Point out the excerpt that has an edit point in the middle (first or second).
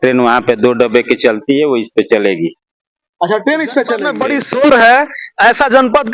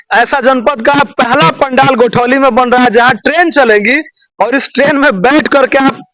first